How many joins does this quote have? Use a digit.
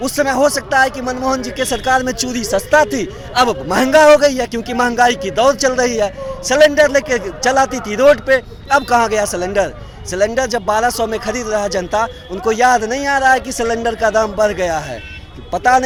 0